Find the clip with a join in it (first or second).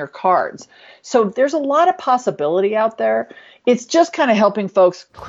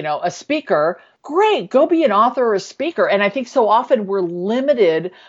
second